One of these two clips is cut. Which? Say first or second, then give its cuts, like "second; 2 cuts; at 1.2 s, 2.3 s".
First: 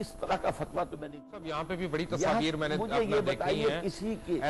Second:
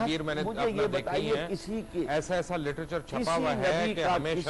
first; 1 cut; at 1.3 s